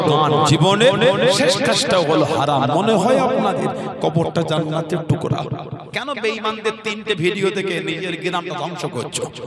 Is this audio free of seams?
no; 1 cut; at 5.8 s

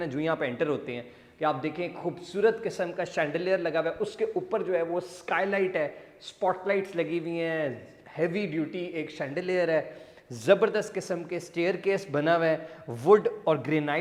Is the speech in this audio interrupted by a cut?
no; 0 cuts

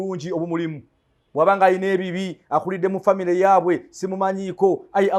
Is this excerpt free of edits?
yes; 0 cuts

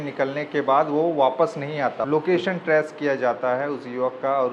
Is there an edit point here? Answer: yes; 1 cut; at 2.0 s

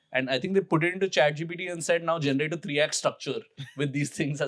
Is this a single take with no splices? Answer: yes; 0 cuts

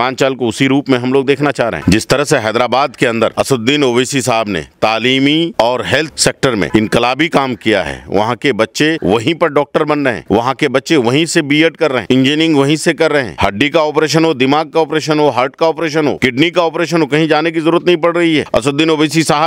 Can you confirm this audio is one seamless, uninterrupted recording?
yes; 0 cuts

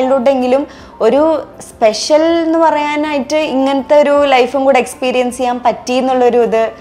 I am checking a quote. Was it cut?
no; 0 cuts

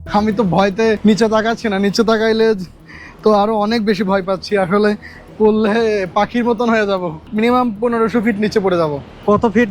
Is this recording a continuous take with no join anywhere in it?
no; 2 cuts; at 1.0 s, 7.3 s

